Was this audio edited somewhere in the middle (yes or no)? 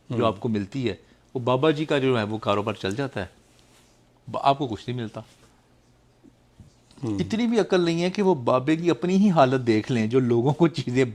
no